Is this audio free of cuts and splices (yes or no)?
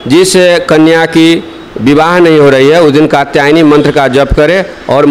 yes